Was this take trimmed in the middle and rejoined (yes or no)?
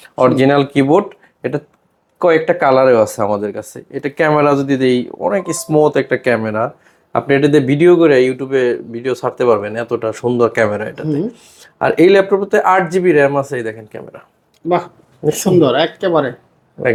no